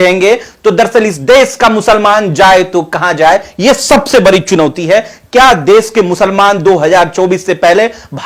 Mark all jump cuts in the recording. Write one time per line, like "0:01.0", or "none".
none